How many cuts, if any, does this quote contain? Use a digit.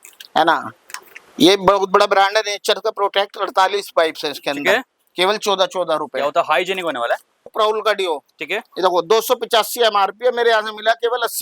1